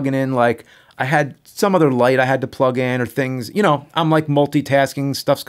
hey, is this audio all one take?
yes; 0 cuts

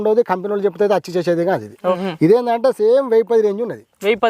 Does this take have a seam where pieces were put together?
yes; 1 cut; at 2.0 s

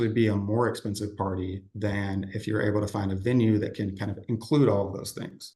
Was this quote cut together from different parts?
no; 0 cuts

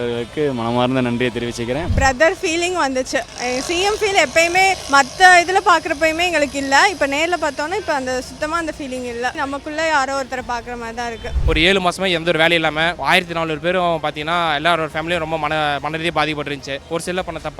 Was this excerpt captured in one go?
no; 6 cuts; at 1.9 s, 4.8 s, 9.3 s, 11.3 s, 13.0 s, 16.8 s

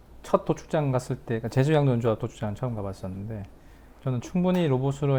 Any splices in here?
no; 0 cuts

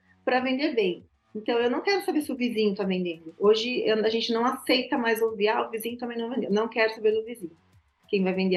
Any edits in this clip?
no; 0 cuts

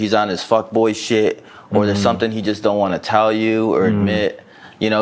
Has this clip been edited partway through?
no; 0 cuts

